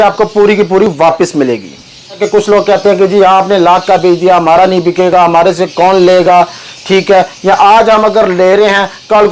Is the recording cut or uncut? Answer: cut